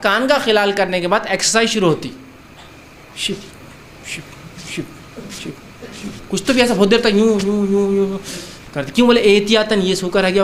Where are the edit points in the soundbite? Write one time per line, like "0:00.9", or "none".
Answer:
none